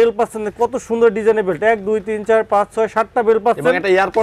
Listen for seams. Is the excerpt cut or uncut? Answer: uncut